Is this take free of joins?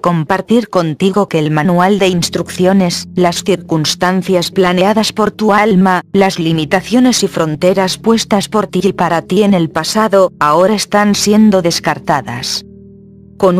no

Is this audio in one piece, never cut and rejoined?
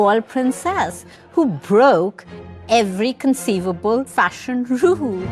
no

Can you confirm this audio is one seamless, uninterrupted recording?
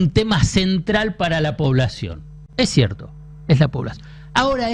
yes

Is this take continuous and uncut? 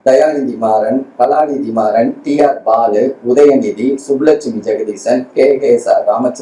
yes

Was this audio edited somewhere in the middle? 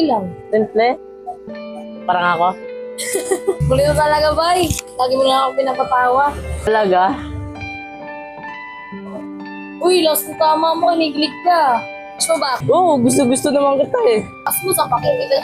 yes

